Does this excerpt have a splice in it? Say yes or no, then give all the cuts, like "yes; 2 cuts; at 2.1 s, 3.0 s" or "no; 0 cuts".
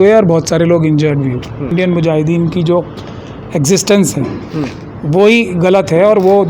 yes; 1 cut; at 1.7 s